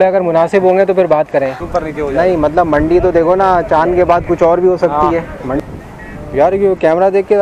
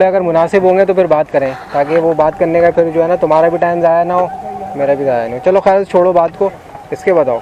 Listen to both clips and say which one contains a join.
first; 2 cuts; at 1.6 s, 5.6 s

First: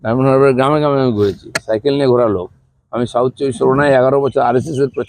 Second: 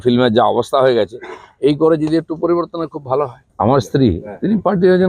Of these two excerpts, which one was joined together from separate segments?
second; 1 cut; at 3.4 s

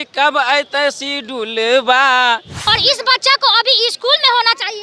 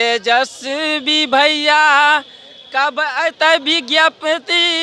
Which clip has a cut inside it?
first; 1 cut; at 2.5 s

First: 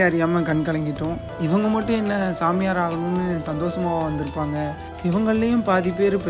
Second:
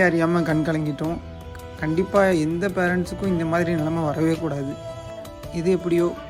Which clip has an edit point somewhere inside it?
first; 1 cut; at 1.3 s

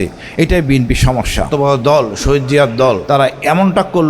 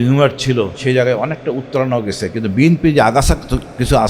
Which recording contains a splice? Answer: first; 2 cuts; at 1.5 s, 3.0 s

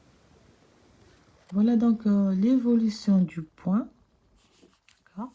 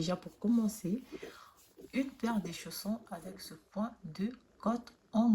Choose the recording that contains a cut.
first; 1 cut; at 1.4 s

